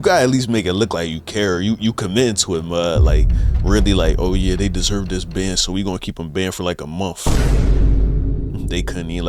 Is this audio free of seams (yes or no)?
yes